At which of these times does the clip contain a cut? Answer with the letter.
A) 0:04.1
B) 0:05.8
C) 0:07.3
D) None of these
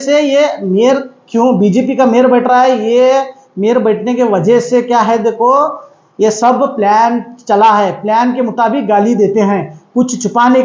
D